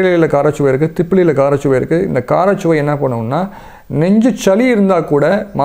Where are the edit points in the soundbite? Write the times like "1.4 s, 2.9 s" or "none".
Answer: none